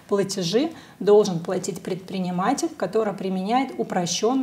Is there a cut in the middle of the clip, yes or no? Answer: no